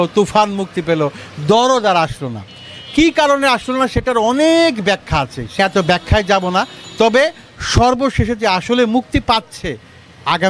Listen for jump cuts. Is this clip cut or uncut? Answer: cut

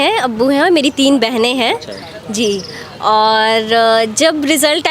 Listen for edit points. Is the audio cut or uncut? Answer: uncut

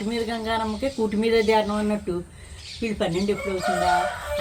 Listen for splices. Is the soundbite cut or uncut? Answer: uncut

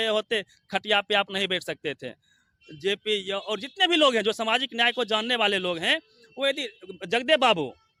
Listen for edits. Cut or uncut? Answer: uncut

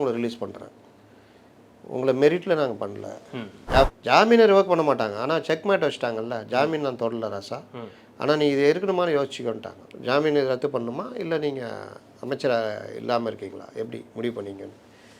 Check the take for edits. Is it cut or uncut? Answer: cut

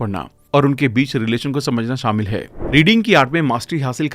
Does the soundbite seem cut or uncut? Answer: cut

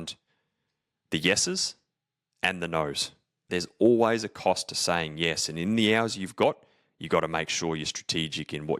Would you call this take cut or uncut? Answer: cut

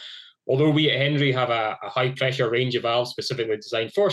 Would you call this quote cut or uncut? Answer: uncut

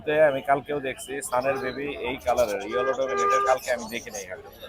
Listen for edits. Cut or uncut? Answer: uncut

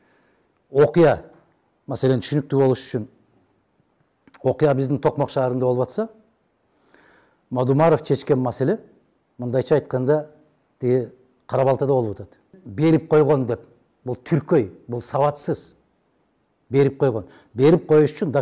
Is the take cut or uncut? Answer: cut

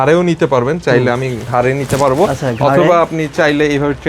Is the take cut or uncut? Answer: uncut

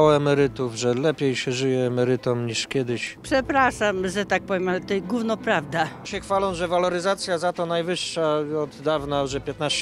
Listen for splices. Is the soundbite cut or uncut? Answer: cut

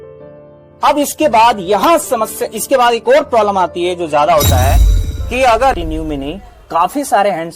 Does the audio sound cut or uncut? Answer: cut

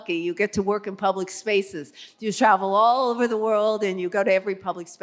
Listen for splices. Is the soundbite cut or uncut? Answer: uncut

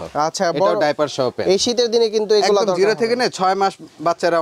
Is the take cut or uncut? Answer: uncut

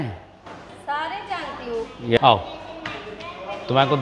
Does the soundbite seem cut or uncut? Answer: cut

